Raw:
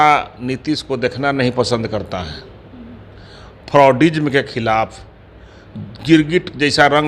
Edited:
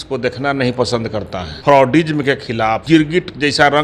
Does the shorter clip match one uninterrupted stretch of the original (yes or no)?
no